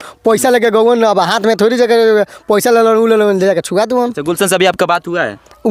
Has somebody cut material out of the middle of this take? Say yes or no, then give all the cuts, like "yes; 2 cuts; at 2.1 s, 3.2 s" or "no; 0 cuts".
no; 0 cuts